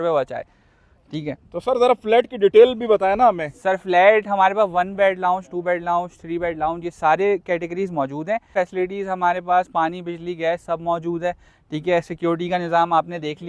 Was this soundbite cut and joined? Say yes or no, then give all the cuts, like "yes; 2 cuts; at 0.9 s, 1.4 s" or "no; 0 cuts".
yes; 1 cut; at 8.5 s